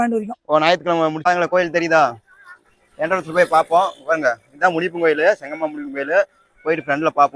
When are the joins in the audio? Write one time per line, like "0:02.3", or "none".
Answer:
0:01.2